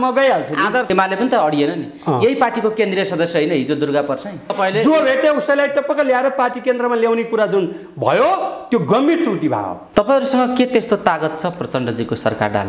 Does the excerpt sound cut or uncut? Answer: cut